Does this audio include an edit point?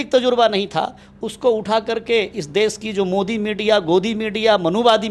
no; 0 cuts

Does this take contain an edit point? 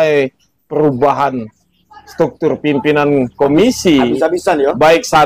no; 0 cuts

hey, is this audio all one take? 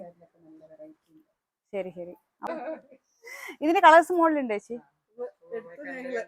no; 1 cut; at 2.5 s

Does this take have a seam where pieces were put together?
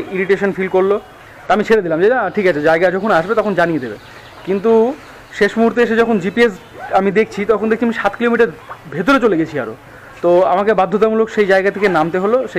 no; 0 cuts

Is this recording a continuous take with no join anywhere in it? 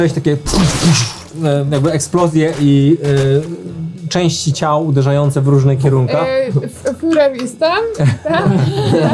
yes; 0 cuts

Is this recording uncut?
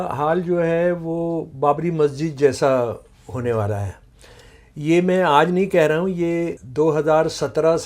no; 1 cut; at 6.6 s

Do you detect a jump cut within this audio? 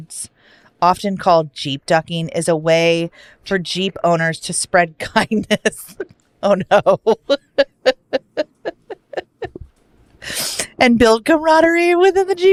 no; 0 cuts

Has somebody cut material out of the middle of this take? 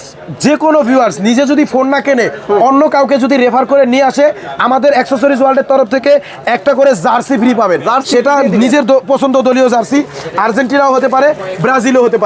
no; 0 cuts

